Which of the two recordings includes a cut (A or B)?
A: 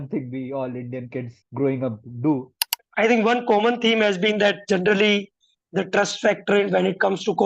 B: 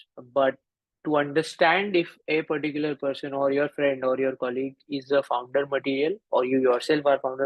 A